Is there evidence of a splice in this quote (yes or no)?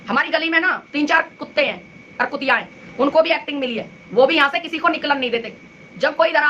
no